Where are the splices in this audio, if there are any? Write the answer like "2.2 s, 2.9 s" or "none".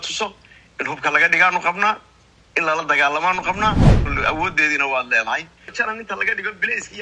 4.0 s, 5.6 s